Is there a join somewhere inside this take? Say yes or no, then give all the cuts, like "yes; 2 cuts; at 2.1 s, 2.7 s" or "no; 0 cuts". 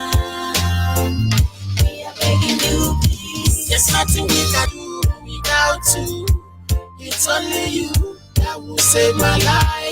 yes; 1 cut; at 4.7 s